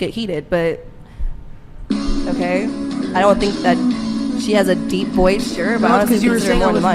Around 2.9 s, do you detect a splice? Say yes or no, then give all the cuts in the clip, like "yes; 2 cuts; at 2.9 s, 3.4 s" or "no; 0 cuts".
yes; 1 cut; at 2.9 s